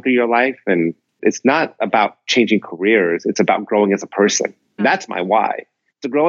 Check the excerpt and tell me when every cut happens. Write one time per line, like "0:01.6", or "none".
0:01.2
0:04.8